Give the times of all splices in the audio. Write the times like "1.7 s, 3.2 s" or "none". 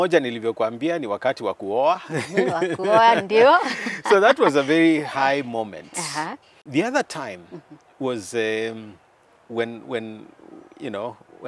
6.6 s